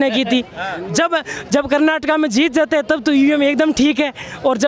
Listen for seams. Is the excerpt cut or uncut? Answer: uncut